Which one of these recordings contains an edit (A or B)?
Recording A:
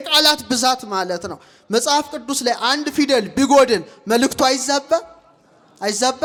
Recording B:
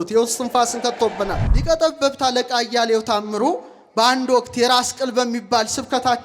B